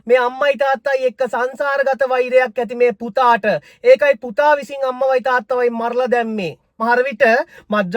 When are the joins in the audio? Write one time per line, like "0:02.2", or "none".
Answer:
0:06.8